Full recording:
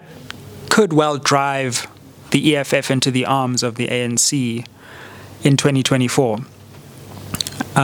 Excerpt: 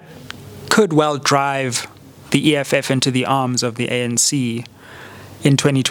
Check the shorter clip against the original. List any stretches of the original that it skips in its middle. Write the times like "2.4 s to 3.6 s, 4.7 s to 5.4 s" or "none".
none

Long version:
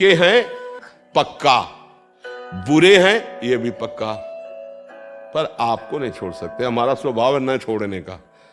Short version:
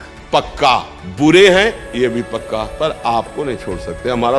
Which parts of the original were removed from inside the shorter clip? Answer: 1.8 s to 2.5 s, 4.2 s to 5.3 s

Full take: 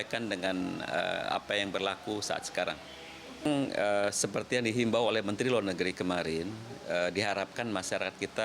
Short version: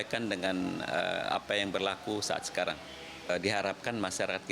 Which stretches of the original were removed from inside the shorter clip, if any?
3.3 s to 7.0 s

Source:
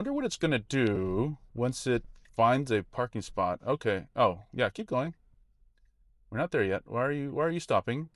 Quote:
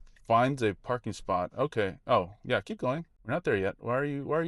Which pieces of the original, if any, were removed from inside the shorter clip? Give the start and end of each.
5.2 s to 6.2 s

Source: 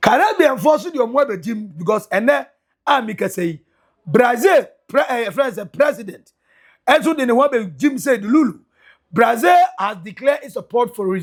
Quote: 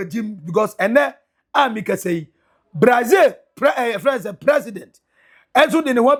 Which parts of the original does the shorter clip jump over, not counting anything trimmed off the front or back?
none

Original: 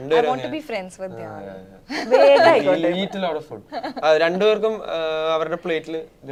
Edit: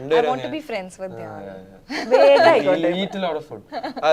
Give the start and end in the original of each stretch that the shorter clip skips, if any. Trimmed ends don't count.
none

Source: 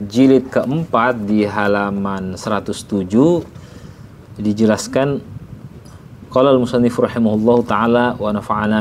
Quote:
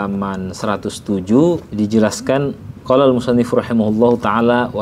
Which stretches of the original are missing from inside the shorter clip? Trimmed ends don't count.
3.5 s to 4.3 s, 5.3 s to 6.1 s

